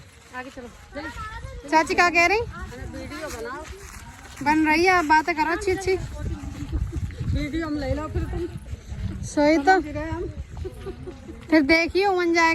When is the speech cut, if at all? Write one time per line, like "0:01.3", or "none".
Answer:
none